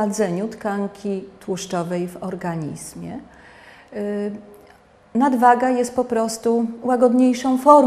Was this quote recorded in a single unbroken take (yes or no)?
no